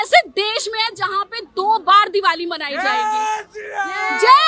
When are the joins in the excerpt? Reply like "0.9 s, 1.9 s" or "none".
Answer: none